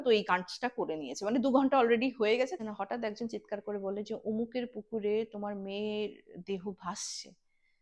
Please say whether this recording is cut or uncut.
cut